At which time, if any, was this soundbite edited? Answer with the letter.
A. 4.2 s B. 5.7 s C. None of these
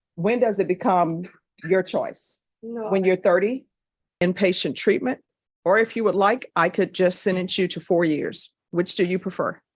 A